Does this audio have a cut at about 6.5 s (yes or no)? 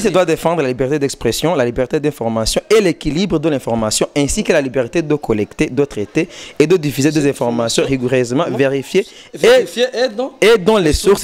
no